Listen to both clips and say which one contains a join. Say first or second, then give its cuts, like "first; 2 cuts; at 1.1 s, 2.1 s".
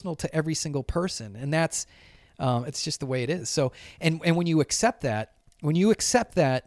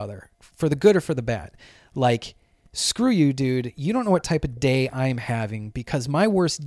first; 1 cut; at 2.7 s